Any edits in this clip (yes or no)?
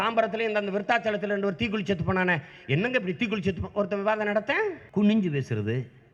yes